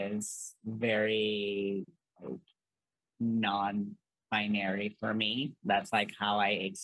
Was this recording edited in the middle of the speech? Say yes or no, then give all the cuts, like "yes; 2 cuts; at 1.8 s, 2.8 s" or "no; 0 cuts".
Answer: no; 0 cuts